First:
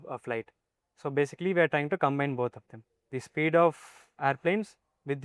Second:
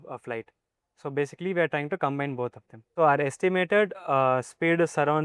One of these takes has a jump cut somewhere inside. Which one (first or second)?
second